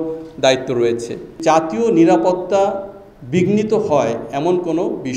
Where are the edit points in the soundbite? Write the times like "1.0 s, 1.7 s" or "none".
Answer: 1.2 s